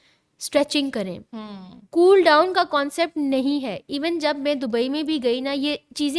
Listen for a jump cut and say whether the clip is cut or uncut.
uncut